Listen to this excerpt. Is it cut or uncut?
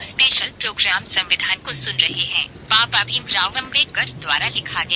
cut